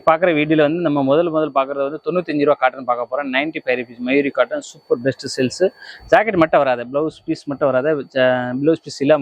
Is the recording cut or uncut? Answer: uncut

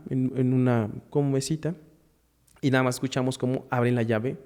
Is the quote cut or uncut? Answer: uncut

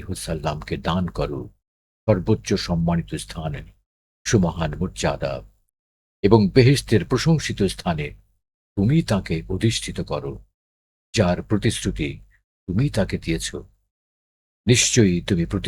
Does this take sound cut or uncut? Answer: uncut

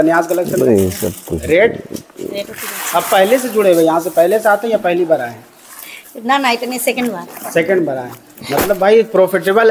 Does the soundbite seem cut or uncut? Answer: uncut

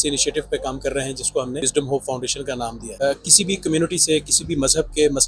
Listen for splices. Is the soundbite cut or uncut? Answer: cut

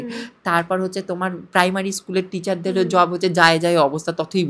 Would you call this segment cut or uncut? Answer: uncut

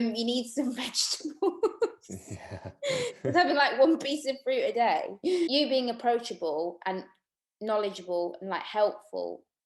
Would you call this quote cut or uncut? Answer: cut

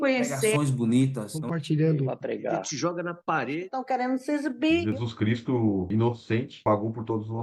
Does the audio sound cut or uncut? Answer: uncut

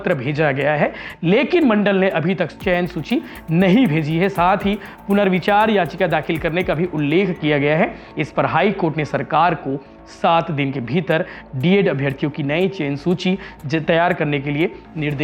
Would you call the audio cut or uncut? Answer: uncut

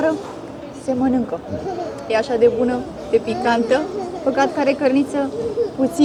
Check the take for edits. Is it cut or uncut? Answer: uncut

